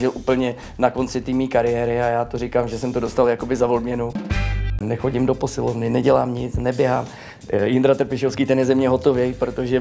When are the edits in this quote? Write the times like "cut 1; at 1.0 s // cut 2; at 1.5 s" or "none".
cut 1; at 4.6 s